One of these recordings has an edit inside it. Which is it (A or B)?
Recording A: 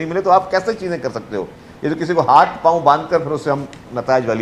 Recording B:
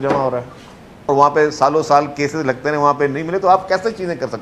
B